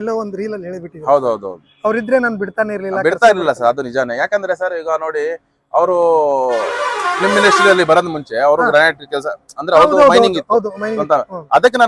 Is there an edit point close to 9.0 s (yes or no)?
no